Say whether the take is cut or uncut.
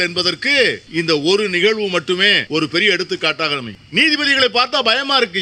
cut